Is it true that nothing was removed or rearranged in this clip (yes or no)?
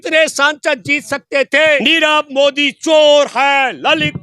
no